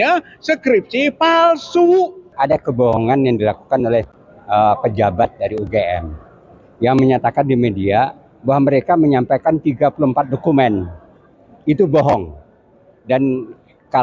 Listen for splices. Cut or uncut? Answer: cut